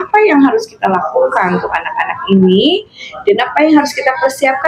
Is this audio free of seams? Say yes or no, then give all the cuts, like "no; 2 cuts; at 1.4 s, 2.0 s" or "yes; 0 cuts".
yes; 0 cuts